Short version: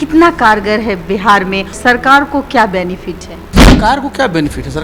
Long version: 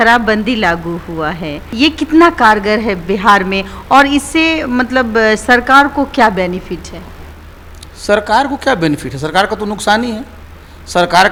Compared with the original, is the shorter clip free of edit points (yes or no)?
no